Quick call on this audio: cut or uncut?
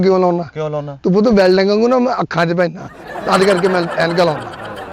uncut